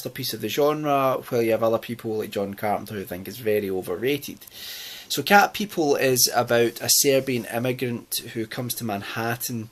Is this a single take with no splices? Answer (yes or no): yes